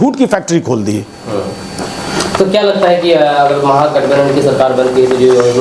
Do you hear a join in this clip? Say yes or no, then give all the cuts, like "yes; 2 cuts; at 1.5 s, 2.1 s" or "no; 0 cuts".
no; 0 cuts